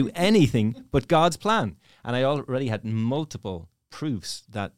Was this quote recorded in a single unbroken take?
yes; 0 cuts

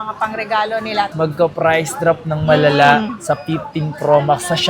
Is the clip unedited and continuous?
no; 1 cut; at 1.1 s

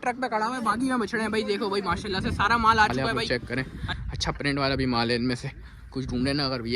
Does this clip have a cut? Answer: yes; 1 cut; at 2.9 s

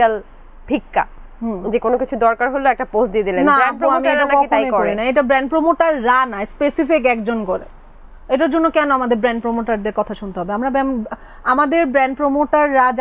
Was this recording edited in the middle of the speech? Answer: no; 0 cuts

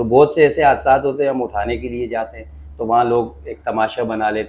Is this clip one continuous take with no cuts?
yes; 0 cuts

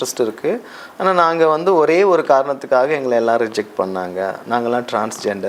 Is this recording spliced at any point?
no; 0 cuts

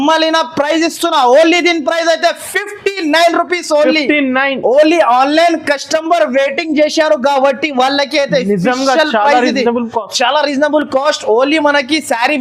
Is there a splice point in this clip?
no; 0 cuts

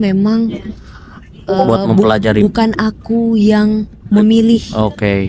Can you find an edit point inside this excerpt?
no; 0 cuts

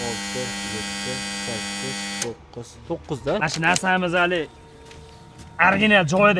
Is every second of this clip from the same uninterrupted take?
no; 1 cut; at 3.4 s

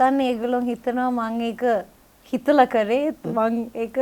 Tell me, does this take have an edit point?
no; 0 cuts

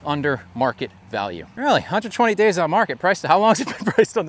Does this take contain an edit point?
yes; 1 cut; at 1.4 s

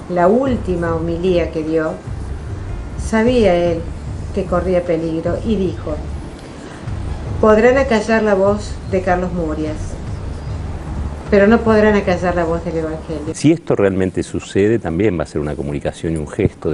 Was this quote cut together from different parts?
no; 0 cuts

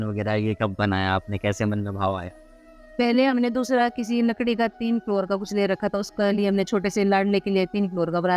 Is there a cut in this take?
no; 0 cuts

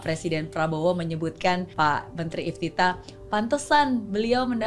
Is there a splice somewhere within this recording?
yes; 1 cut; at 1.7 s

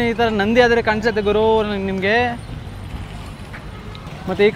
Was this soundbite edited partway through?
no; 0 cuts

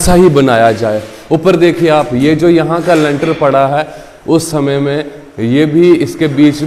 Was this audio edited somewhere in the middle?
no; 0 cuts

